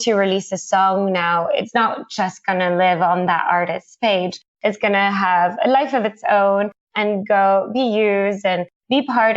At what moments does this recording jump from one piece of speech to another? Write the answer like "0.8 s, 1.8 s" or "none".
1.7 s